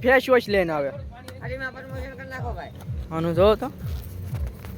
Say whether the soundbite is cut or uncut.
uncut